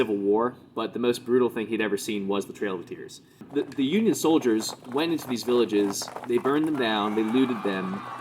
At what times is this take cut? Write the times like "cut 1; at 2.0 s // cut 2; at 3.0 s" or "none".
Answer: cut 1; at 3.4 s